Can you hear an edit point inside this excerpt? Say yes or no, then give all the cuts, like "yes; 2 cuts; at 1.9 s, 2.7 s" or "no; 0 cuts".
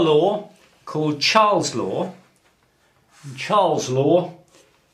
yes; 1 cut; at 1.5 s